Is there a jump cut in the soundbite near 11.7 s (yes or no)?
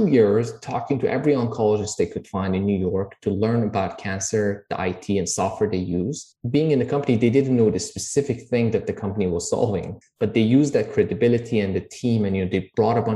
no